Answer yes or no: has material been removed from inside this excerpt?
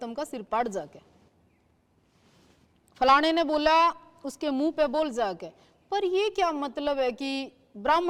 no